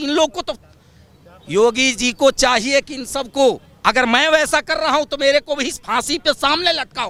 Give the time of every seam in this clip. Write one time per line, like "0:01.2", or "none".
none